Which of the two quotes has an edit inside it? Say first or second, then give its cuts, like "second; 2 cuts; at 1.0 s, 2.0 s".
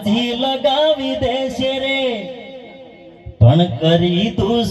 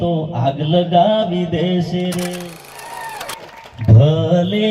second; 1 cut; at 2.7 s